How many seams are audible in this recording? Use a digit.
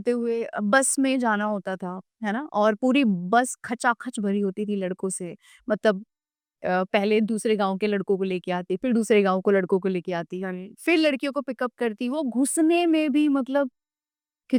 0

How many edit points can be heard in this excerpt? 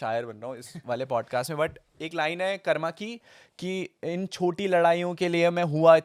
0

